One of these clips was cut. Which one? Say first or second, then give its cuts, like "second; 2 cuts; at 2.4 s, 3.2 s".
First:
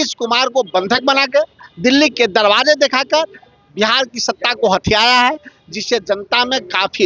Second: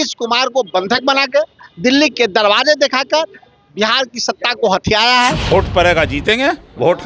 second; 1 cut; at 5.5 s